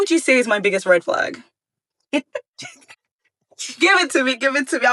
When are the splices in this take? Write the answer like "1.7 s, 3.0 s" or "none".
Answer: none